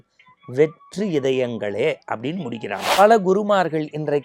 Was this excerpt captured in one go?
no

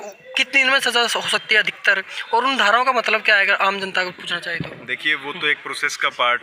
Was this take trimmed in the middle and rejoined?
no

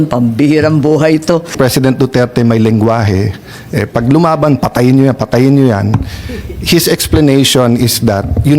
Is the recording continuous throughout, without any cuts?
no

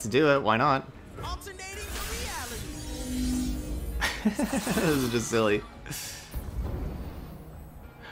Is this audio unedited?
no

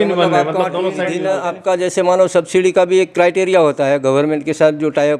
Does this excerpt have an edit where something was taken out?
yes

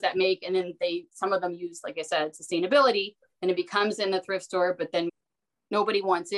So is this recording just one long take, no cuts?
no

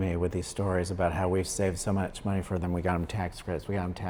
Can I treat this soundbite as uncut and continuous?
yes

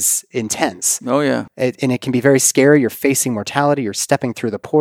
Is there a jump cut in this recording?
no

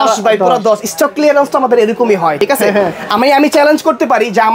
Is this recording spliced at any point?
no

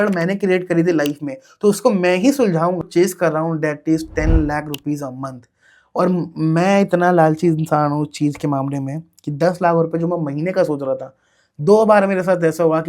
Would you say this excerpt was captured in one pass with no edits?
no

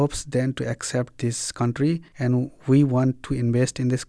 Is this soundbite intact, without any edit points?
no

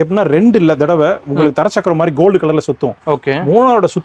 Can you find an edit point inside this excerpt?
no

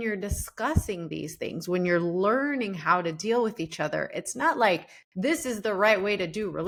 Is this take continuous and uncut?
yes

